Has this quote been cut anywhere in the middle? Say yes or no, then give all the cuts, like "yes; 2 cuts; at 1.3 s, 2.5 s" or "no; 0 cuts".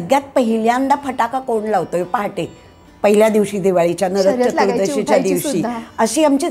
no; 0 cuts